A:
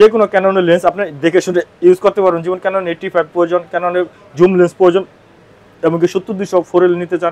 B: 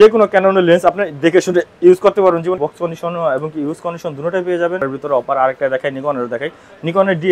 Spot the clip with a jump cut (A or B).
B